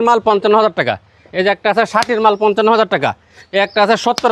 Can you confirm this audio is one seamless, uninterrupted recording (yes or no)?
yes